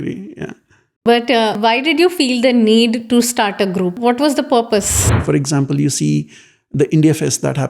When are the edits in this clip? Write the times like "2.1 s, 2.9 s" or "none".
1.6 s, 4.0 s, 5.1 s